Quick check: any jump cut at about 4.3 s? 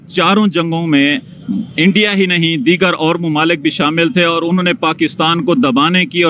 yes; 1 cut; at 4.3 s

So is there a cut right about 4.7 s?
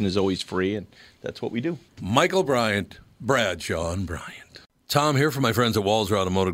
yes; 1 cut; at 4.7 s

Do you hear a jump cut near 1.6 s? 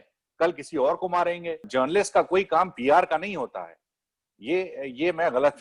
yes; 1 cut; at 1.6 s

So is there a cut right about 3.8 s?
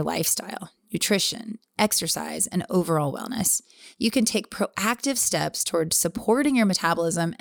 yes; 1 cut; at 3.8 s

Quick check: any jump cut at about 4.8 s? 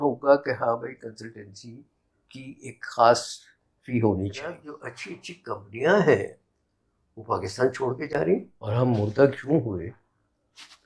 yes; 2 cuts; at 4.8 s, 8.6 s

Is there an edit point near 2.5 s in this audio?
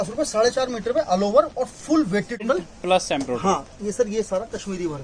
yes; 1 cut; at 2.5 s

